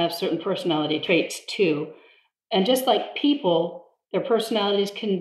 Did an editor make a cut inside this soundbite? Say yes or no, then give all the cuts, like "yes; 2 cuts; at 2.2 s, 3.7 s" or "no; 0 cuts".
no; 0 cuts